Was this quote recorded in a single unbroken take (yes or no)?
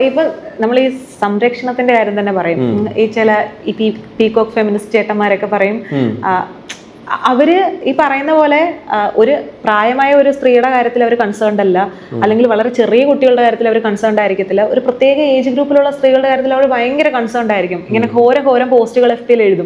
yes